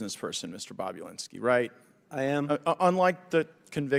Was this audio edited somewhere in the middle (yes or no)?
no